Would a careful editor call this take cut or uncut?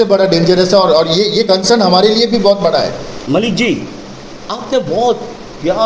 cut